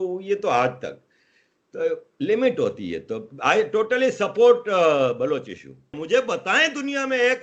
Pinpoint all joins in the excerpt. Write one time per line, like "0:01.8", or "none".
0:06.0